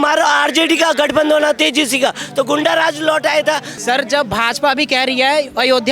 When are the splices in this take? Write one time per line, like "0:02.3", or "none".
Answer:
0:03.7